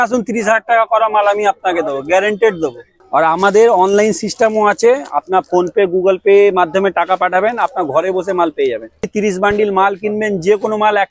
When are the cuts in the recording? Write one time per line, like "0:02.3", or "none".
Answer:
0:02.9
0:09.1